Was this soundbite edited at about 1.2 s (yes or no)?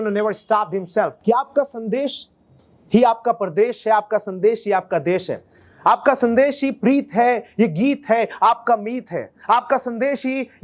yes